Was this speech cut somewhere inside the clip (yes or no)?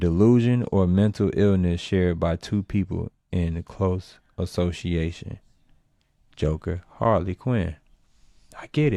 no